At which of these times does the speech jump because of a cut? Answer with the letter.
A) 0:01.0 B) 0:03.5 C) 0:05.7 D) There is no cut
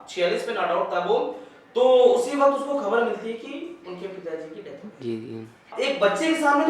C